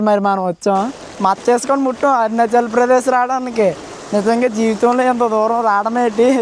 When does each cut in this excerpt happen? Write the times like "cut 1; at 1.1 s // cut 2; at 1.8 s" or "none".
cut 1; at 1.0 s